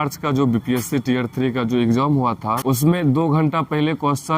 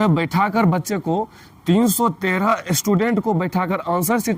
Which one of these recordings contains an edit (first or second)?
first